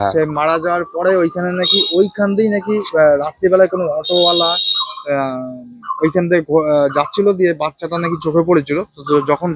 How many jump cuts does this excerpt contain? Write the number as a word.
zero